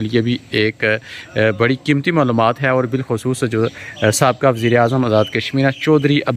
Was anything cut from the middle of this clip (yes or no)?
no